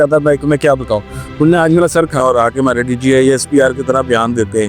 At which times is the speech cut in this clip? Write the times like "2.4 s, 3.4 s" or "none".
2.2 s